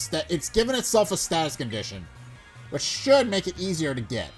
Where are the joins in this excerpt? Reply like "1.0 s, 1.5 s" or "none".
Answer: none

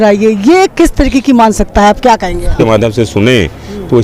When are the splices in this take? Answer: 2.6 s

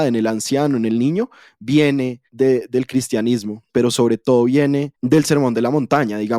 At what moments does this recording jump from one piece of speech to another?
2.2 s, 3.7 s, 4.9 s

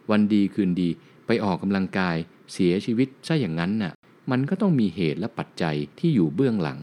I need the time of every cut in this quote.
2.4 s, 4.1 s, 5.9 s

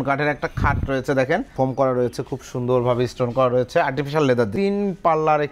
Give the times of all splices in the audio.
1.5 s, 4.5 s

